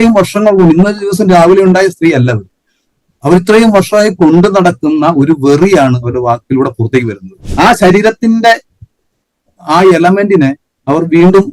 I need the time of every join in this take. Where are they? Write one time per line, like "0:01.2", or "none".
0:07.4